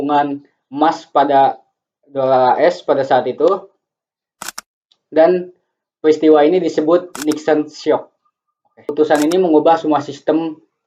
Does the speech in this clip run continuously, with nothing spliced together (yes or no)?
yes